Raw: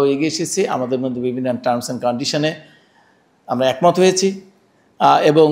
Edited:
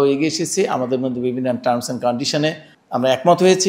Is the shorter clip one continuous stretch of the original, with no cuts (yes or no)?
no